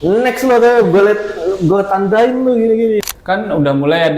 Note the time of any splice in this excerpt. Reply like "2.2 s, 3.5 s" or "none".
3.1 s

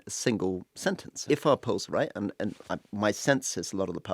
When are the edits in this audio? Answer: 1.2 s

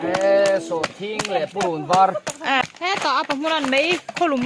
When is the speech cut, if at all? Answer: 2.6 s

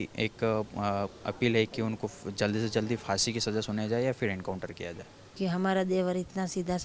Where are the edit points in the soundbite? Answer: 5.4 s

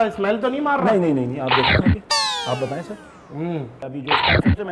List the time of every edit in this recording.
3.8 s

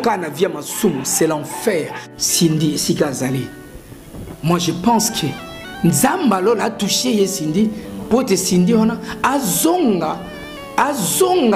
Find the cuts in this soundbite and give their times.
2.0 s

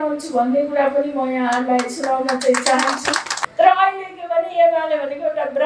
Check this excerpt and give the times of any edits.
3.4 s

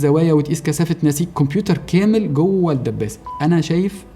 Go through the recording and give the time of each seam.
3.2 s

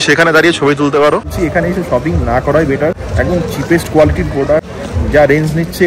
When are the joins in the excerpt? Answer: 1.3 s, 3.0 s, 4.7 s

